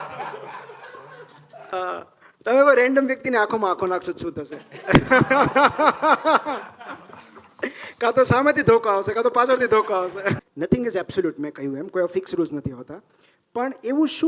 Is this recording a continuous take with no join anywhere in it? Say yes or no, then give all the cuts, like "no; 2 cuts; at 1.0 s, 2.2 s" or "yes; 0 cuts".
no; 2 cuts; at 1.7 s, 10.4 s